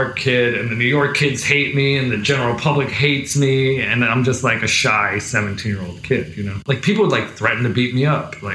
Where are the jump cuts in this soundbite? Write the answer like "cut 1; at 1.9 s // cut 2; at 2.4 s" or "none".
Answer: cut 1; at 6.6 s